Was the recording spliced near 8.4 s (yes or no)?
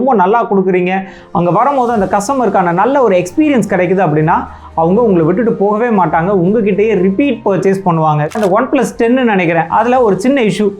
yes